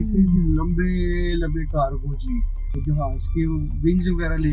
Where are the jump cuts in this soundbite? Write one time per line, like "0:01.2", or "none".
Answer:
0:02.7